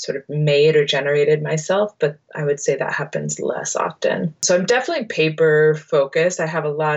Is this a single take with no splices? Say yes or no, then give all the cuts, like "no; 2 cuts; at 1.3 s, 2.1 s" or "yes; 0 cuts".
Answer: yes; 0 cuts